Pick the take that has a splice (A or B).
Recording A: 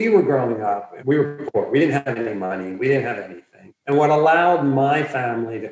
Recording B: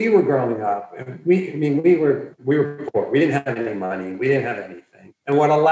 A